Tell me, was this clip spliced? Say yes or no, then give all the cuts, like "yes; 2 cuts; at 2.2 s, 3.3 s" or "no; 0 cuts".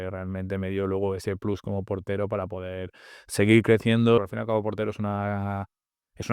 yes; 1 cut; at 4.2 s